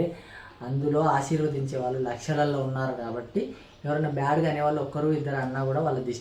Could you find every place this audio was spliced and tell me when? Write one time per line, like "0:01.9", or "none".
none